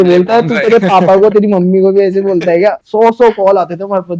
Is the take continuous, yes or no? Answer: no